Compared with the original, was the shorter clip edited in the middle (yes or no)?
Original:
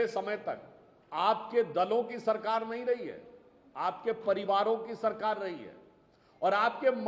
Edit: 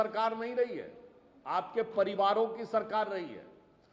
no